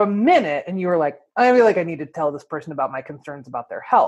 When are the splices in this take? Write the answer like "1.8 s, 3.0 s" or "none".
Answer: none